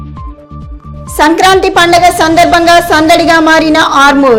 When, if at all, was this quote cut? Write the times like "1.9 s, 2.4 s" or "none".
none